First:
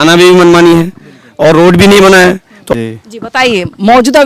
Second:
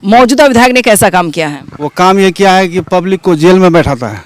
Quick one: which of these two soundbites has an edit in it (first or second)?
first